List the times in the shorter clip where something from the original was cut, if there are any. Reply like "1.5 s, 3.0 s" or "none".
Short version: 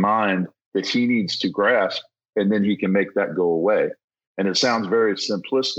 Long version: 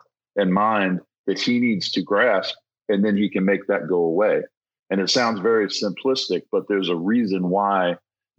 none

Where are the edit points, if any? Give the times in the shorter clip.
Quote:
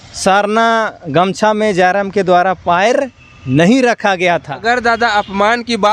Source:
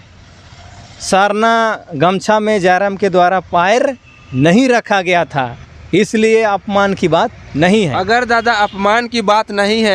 4.5 s

